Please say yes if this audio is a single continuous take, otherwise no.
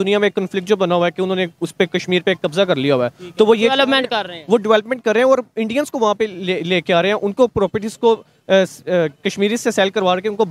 yes